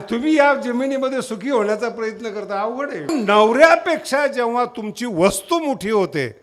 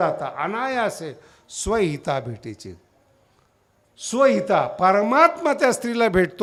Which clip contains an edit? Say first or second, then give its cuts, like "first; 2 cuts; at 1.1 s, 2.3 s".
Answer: first; 1 cut; at 3.1 s